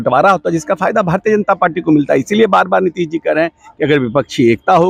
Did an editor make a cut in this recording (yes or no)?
no